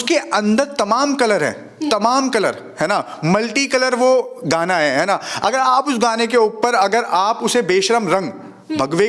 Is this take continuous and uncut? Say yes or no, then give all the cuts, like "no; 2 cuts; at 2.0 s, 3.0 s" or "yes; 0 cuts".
yes; 0 cuts